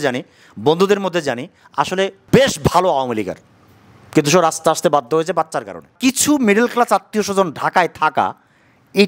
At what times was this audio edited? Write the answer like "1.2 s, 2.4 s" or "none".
2.2 s, 5.9 s